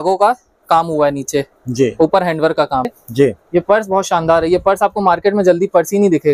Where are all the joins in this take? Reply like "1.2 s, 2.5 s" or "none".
3.0 s